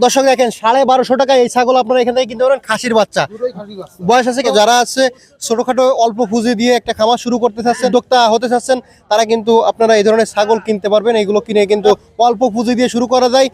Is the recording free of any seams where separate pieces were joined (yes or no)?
no